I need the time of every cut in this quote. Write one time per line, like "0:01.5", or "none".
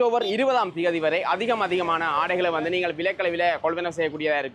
none